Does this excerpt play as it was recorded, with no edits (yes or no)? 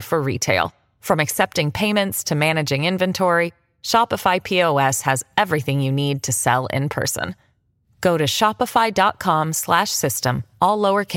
yes